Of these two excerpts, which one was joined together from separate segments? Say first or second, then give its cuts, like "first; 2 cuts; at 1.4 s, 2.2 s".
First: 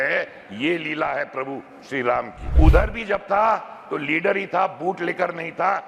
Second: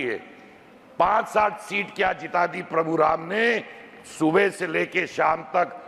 first; 1 cut; at 2.4 s